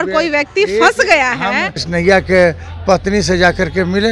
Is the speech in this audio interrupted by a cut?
yes; 1 cut; at 1.8 s

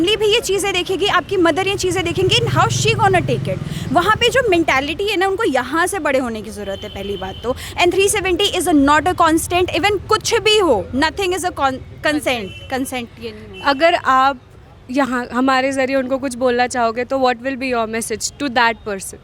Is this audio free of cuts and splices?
yes; 0 cuts

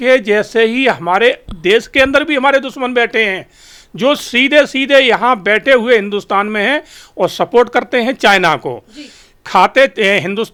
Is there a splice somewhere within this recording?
no; 0 cuts

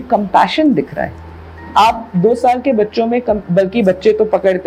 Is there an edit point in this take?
no; 0 cuts

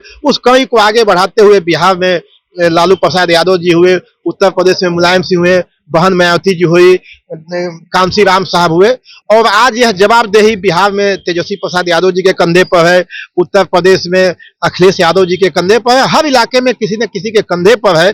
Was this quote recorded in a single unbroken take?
yes; 0 cuts

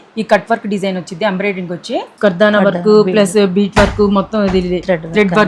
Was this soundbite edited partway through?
yes; 1 cut; at 2.1 s

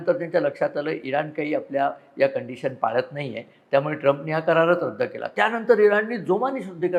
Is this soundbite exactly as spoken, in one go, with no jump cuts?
yes; 0 cuts

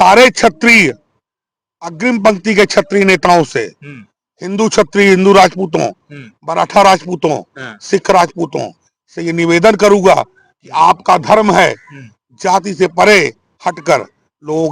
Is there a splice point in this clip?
no; 0 cuts

